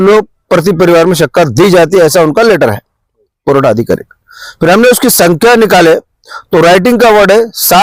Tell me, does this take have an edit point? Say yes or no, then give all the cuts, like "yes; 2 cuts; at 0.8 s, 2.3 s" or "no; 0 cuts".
no; 0 cuts